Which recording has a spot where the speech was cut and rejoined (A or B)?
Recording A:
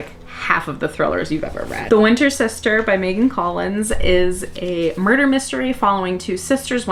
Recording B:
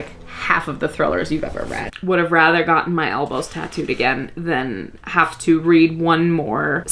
B